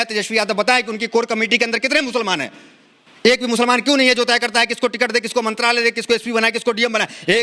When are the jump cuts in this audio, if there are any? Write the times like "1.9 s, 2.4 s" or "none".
none